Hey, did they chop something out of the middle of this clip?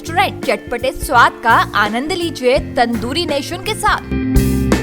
no; 0 cuts

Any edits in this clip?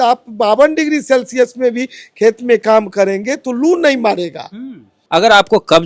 yes; 1 cut; at 4.9 s

